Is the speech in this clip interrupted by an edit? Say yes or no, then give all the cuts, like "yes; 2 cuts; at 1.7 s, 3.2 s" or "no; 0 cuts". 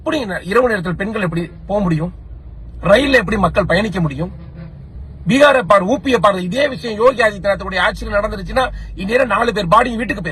no; 0 cuts